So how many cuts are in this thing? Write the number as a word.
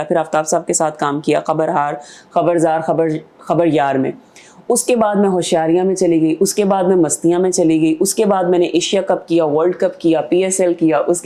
zero